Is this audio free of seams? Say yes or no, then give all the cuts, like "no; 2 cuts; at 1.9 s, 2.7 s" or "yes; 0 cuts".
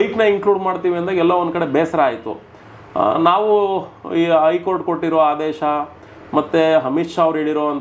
yes; 0 cuts